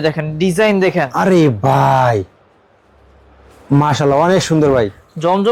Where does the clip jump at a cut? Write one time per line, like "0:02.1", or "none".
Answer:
none